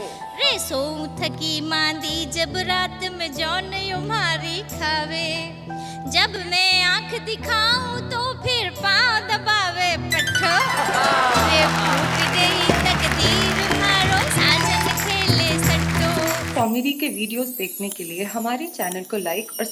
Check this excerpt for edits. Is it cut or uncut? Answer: cut